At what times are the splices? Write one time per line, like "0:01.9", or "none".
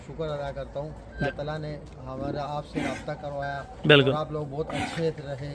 0:01.2

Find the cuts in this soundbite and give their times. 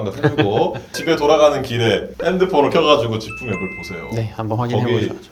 none

